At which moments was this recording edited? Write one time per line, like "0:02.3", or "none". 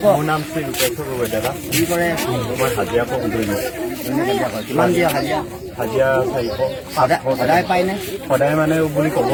none